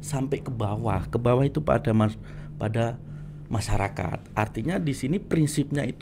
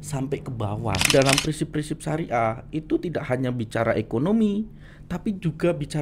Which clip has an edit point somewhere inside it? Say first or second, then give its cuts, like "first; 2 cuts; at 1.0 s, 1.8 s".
second; 1 cut; at 1.1 s